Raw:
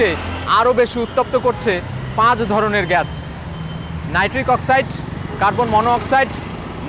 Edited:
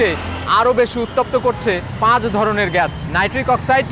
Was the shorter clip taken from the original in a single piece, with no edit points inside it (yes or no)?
no